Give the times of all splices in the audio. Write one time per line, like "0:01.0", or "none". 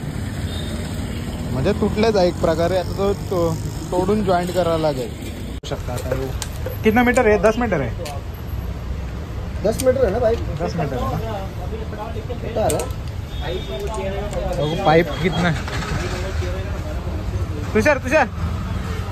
0:05.6